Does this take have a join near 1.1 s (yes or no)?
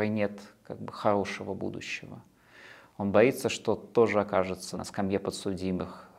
no